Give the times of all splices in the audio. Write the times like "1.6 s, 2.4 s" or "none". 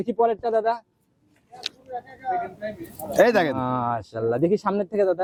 none